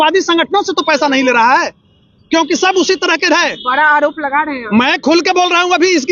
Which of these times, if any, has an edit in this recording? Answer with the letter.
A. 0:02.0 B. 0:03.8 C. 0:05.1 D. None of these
D